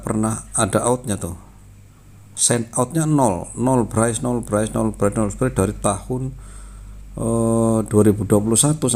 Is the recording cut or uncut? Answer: uncut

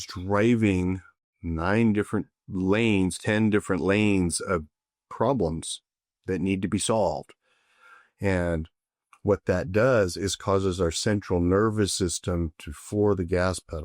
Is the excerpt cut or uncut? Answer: uncut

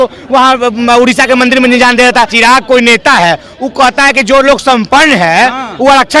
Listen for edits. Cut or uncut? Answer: cut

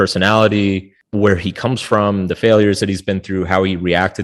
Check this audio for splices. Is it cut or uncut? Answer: cut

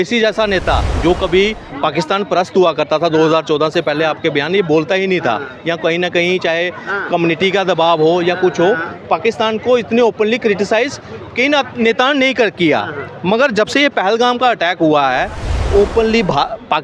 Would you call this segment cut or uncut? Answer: cut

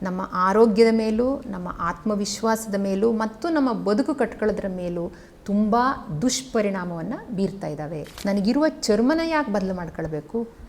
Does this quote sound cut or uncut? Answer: cut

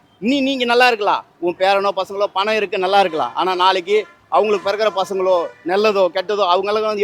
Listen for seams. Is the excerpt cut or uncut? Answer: uncut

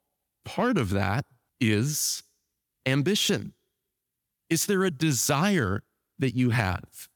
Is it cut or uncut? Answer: cut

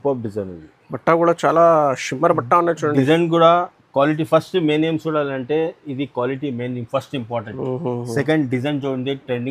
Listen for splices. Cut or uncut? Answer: uncut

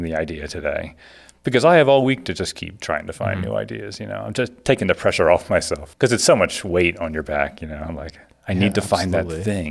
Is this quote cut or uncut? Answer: cut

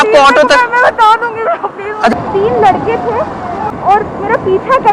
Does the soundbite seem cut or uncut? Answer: cut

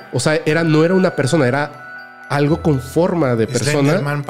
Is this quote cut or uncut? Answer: uncut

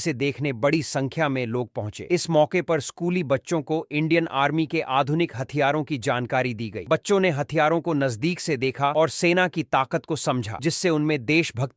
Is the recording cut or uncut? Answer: uncut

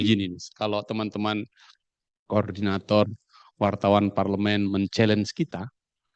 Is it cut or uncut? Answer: uncut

